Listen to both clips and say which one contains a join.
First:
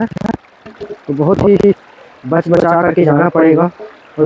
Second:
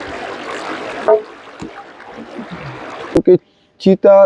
second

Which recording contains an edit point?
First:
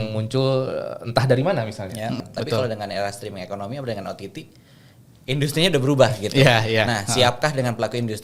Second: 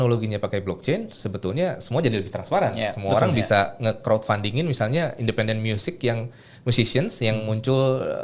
first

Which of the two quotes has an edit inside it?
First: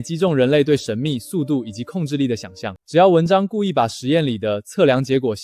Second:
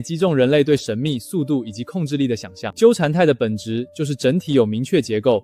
second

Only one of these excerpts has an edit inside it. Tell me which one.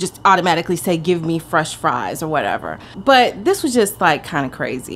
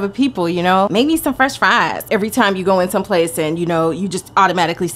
second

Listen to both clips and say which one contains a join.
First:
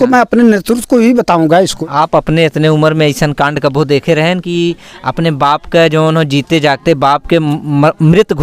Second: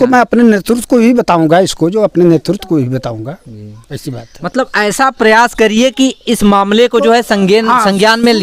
first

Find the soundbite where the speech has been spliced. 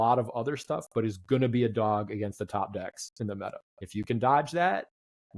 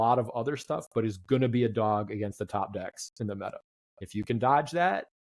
first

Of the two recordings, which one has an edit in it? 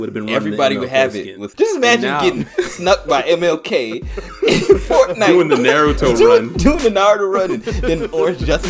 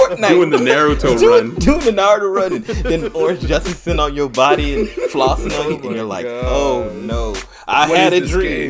first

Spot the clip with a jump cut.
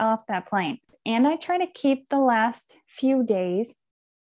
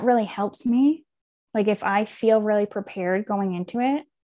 first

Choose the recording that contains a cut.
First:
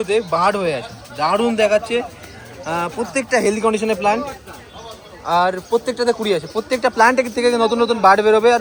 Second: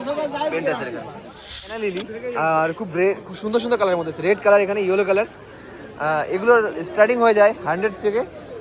second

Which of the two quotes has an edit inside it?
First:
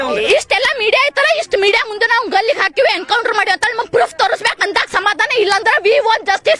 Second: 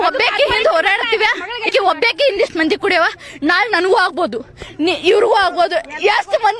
second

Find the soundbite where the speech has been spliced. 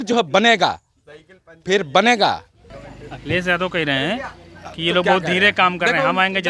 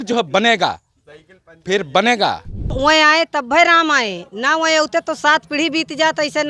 second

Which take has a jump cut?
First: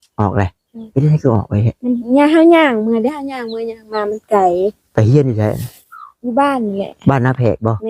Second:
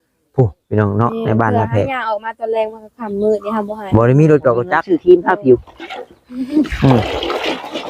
second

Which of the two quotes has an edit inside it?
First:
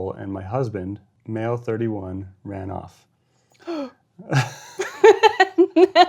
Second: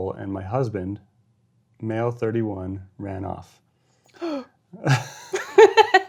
first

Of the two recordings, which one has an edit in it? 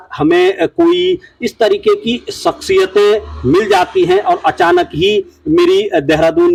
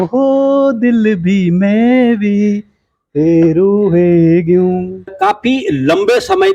second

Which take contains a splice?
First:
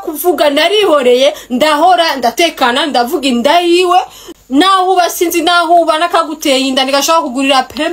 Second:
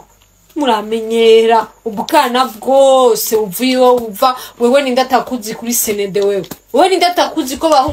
first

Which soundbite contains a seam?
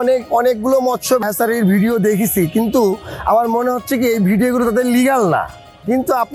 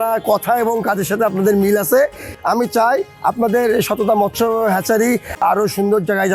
second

